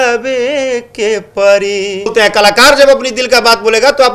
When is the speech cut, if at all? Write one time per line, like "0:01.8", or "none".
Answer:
0:02.1